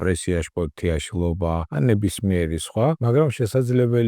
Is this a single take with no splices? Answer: no; 2 cuts; at 1.7 s, 3.0 s

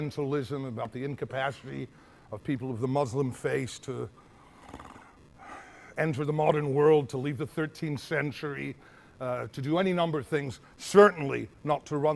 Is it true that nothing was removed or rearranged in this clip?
yes; 0 cuts

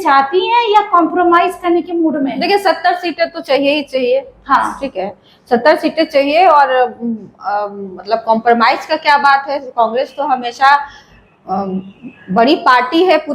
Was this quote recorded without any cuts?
yes; 0 cuts

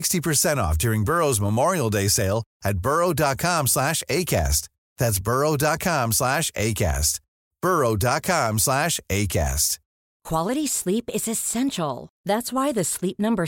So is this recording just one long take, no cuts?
no; 1 cut; at 10.1 s

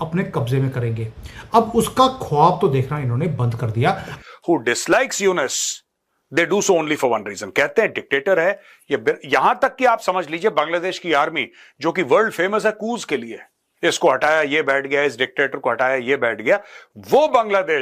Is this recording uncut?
no; 1 cut; at 4.1 s

